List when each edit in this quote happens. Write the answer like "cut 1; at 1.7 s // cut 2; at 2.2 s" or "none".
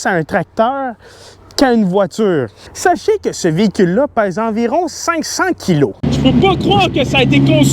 cut 1; at 2.6 s // cut 2; at 6.0 s